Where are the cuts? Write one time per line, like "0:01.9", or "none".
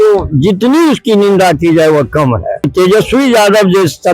0:02.7